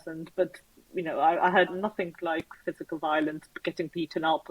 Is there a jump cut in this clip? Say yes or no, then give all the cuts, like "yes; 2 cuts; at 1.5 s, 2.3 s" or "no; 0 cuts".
yes; 1 cut; at 1.7 s